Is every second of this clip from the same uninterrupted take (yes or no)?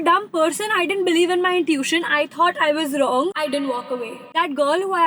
yes